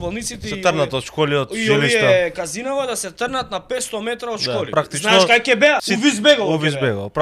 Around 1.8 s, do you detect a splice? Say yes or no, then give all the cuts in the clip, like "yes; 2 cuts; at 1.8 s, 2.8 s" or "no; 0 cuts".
no; 2 cuts; at 4.7 s, 5.9 s